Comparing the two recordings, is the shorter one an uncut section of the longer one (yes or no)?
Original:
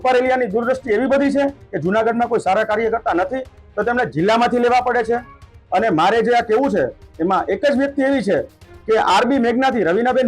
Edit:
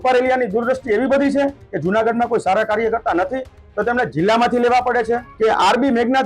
no